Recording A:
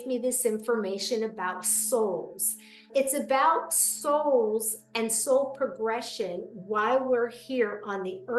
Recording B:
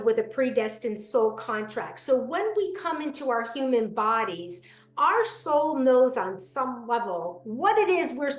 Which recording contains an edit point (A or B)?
A